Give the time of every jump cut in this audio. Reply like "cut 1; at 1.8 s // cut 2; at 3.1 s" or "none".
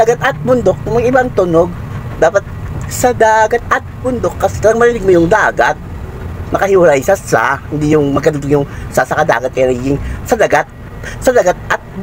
none